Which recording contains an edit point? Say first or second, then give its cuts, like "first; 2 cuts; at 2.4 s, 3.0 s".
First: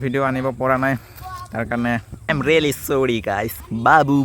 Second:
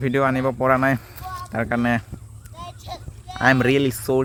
first; 1 cut; at 2.3 s